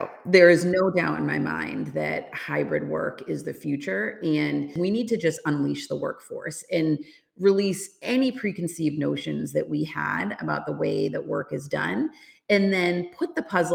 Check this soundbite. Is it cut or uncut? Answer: cut